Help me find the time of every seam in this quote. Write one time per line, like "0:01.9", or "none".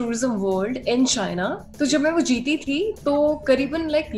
0:01.6